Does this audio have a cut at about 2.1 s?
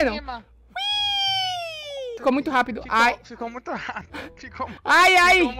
yes; 1 cut; at 2.1 s

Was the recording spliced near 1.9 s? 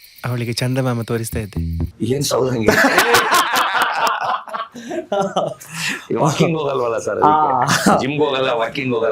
no; 0 cuts

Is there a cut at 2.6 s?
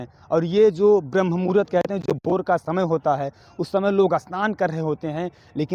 no; 0 cuts

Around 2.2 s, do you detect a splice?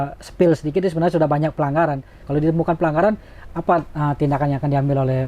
yes; 1 cut; at 2.2 s

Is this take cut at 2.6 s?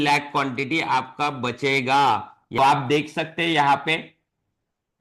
yes; 1 cut; at 2.6 s

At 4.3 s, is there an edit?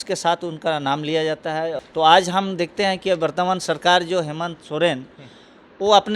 no; 1 cut; at 1.8 s

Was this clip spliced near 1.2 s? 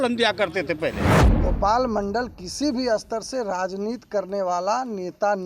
yes; 1 cut; at 1.2 s

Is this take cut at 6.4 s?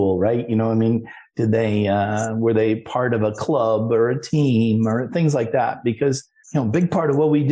yes; 1 cut; at 6.4 s

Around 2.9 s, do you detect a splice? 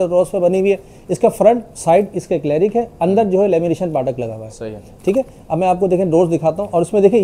no; 0 cuts

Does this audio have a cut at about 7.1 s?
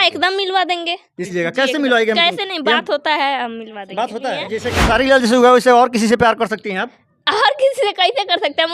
no; 2 cuts; at 1.3 s, 4.5 s

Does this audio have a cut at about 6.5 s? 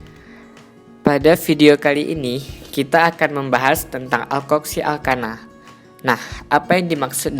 no; 1 cut; at 0.9 s

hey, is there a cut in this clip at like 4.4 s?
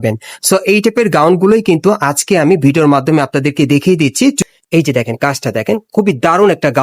yes; 1 cut; at 4.4 s

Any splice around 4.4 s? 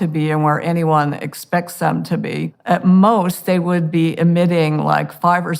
no; 1 cut; at 2.5 s

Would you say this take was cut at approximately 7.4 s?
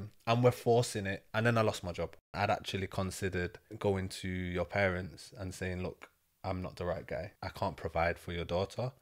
yes; 3 cuts; at 2.2 s, 3.6 s, 7.4 s

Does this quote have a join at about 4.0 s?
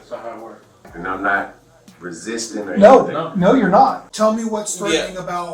yes; 2 cuts; at 0.9 s, 4.0 s

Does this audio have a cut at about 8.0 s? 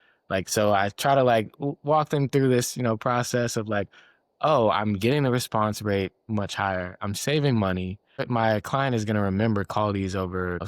yes; 1 cut; at 8.0 s

